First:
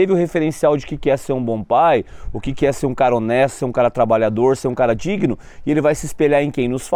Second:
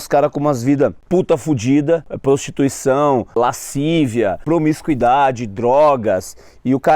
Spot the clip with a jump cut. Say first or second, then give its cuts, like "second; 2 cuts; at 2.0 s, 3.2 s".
second; 4 cuts; at 1.0 s, 2.1 s, 3.4 s, 4.4 s